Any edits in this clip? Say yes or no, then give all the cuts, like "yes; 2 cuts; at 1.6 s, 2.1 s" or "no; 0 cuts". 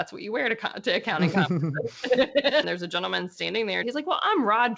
yes; 2 cuts; at 2.6 s, 3.8 s